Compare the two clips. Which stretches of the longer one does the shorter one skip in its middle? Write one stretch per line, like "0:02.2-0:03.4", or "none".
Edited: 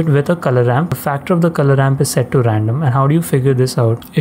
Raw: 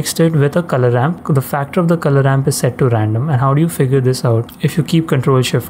0:01.2-0:01.4